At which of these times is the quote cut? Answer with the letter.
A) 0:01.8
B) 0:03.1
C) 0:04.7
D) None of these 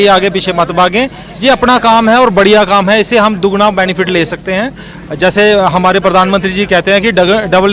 D